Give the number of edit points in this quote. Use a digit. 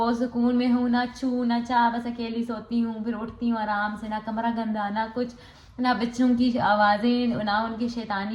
0